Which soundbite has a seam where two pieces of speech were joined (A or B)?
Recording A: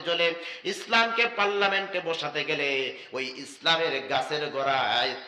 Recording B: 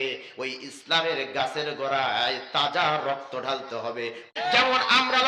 B